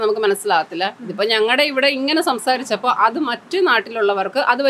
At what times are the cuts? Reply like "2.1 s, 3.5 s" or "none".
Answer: none